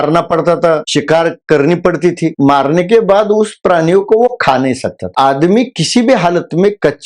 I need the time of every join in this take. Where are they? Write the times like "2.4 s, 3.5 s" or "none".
0.8 s, 2.3 s, 5.1 s